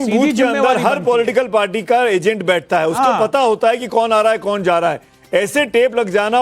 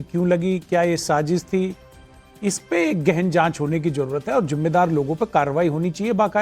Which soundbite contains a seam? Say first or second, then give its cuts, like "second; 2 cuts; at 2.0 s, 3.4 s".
second; 1 cut; at 3.4 s